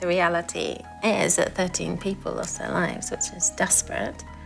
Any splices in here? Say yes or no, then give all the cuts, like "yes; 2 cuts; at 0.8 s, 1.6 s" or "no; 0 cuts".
no; 0 cuts